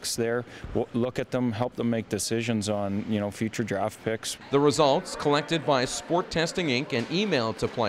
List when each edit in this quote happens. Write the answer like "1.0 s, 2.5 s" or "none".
3.9 s